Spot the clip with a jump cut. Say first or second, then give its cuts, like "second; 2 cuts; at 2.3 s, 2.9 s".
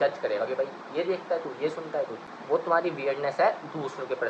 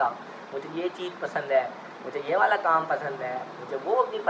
first; 1 cut; at 2.2 s